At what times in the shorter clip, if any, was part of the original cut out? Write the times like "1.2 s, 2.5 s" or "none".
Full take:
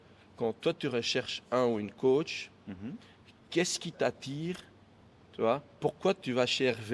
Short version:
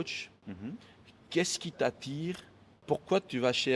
2.8 s